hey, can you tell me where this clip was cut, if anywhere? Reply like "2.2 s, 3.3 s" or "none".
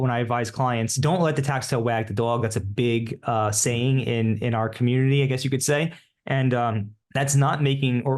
0.9 s, 6.9 s